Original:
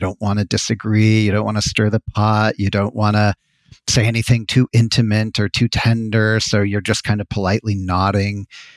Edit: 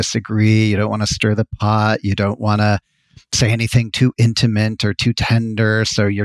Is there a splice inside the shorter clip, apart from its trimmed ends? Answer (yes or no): no